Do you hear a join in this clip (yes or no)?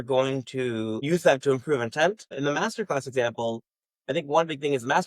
yes